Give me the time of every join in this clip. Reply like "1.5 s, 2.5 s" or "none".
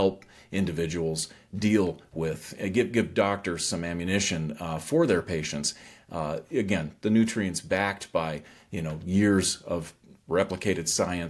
none